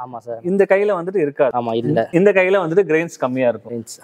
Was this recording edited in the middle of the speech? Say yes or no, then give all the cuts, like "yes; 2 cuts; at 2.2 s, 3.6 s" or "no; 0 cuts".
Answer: no; 0 cuts